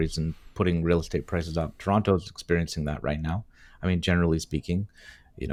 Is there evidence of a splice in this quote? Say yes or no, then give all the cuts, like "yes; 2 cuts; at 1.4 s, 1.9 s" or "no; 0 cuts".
no; 0 cuts